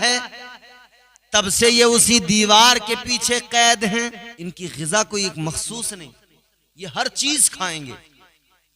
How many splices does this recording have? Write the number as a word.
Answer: one